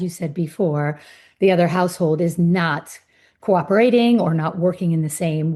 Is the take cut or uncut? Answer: uncut